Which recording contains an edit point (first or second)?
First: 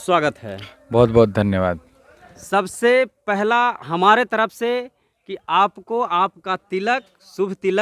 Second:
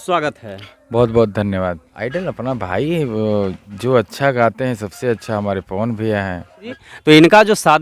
second